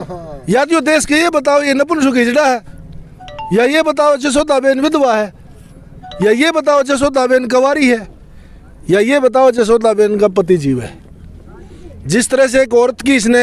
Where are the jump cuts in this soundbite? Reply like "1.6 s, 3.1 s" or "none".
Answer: none